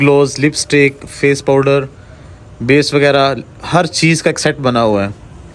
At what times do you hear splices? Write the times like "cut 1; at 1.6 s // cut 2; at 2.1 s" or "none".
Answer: none